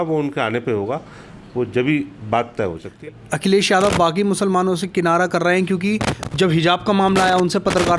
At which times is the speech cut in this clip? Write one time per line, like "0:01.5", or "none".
0:02.9